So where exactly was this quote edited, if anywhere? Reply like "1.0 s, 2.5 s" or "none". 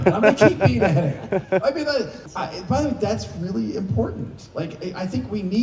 2.2 s